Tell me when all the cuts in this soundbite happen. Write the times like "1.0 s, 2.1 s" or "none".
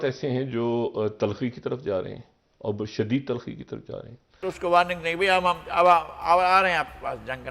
4.4 s